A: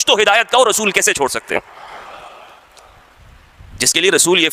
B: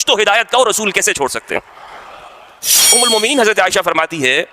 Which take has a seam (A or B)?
B